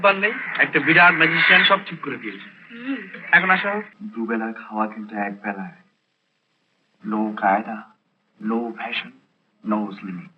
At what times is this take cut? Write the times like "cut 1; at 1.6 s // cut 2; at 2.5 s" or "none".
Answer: cut 1; at 4.0 s